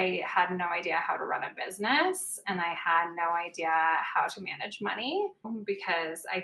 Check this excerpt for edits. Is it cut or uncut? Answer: cut